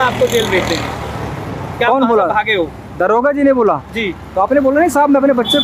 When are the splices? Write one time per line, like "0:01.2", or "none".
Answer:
none